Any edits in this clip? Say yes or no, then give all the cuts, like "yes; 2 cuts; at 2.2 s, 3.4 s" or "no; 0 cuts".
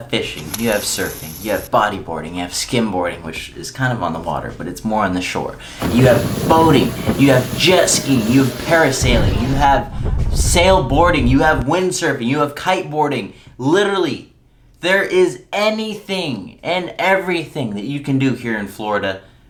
no; 0 cuts